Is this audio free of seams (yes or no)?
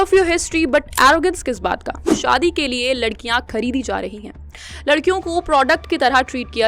no